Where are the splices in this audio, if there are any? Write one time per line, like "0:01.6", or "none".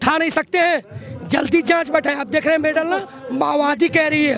0:03.2

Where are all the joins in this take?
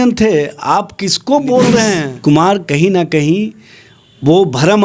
0:02.1

